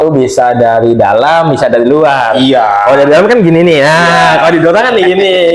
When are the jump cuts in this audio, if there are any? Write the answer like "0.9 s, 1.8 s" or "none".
none